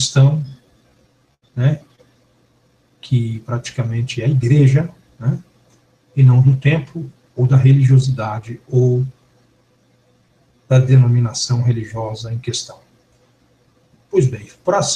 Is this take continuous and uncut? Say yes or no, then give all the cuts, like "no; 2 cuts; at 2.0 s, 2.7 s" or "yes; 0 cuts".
no; 1 cut; at 1.7 s